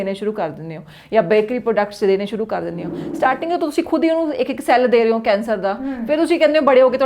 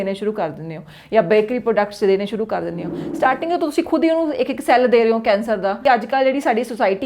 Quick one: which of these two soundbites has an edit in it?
second; 1 cut; at 5.8 s

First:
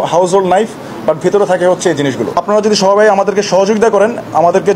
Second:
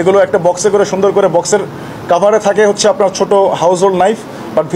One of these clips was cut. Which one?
first; 1 cut; at 2.4 s

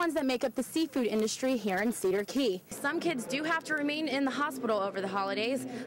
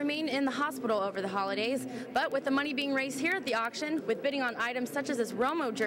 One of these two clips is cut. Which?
first; 1 cut; at 2.8 s

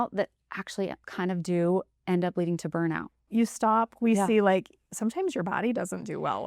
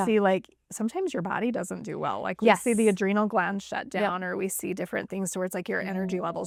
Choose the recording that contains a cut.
first; 2 cuts; at 1.0 s, 3.2 s

